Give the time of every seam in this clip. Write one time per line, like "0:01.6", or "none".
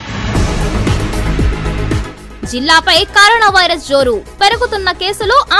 0:02.0